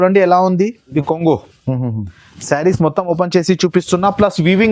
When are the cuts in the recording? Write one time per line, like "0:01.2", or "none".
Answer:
0:00.9